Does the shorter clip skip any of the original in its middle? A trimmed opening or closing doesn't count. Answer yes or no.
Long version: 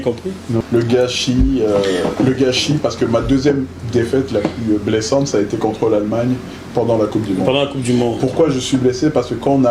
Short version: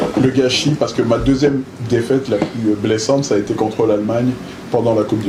no